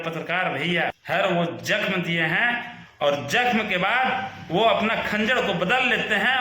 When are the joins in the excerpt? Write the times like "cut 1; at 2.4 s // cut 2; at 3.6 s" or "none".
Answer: cut 1; at 1.0 s